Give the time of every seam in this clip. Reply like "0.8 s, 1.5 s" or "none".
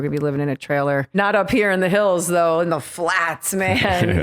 1.2 s